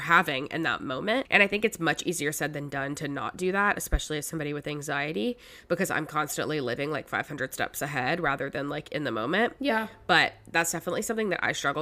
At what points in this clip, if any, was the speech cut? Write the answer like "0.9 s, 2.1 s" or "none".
1.3 s